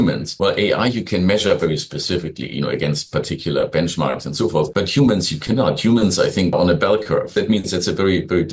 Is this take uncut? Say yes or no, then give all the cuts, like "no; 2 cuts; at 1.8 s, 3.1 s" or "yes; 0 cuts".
yes; 0 cuts